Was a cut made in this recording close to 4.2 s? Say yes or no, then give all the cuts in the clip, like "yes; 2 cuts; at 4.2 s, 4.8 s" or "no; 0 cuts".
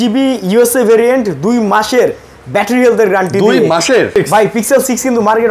yes; 1 cut; at 4.2 s